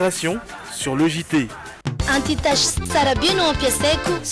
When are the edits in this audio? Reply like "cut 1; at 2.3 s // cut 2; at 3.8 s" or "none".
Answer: cut 1; at 1.8 s